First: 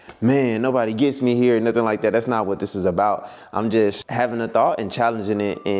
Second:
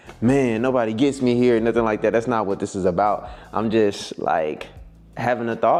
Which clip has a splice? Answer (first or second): first